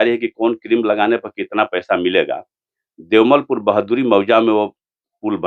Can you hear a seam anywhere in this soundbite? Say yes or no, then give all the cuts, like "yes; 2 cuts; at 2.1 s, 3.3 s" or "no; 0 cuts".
no; 0 cuts